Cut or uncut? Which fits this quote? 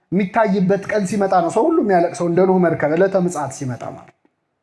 uncut